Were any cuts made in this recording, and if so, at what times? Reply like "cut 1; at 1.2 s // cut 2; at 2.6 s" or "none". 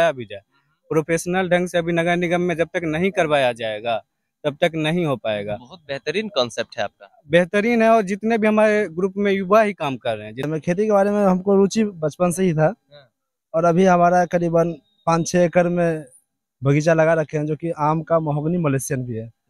cut 1; at 10.5 s

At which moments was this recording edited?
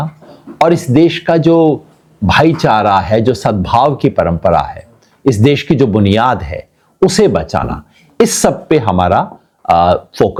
none

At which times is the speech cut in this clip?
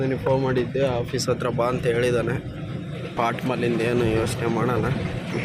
none

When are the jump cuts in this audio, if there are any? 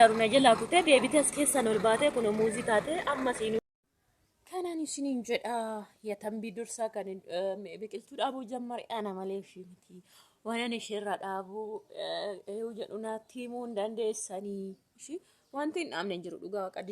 cut 1; at 3.6 s

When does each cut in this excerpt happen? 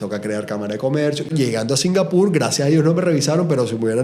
cut 1; at 1.3 s

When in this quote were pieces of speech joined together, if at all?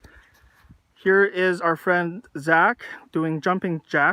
none

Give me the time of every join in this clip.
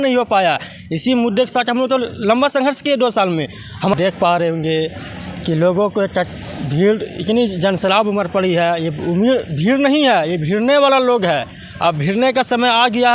cut 1; at 3.9 s

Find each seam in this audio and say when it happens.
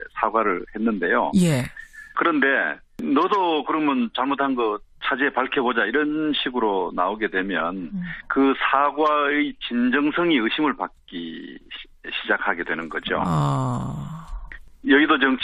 cut 1; at 8.2 s

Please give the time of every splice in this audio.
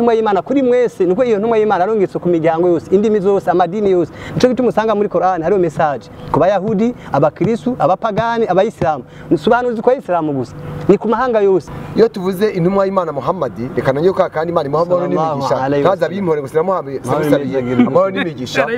cut 1; at 11.8 s

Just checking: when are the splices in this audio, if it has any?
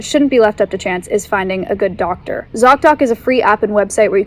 cut 1; at 2.5 s

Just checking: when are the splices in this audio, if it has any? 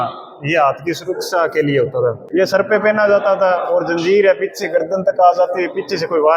cut 1; at 2.2 s

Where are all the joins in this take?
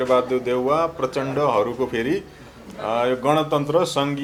none

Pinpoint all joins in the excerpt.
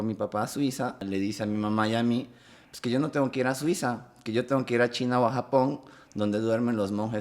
cut 1; at 1.0 s

